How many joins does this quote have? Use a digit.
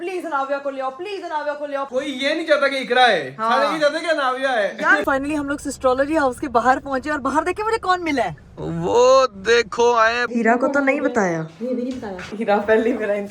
4